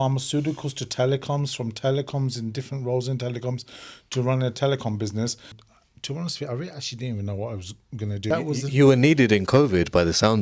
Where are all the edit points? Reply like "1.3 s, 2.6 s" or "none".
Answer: 5.7 s, 8.2 s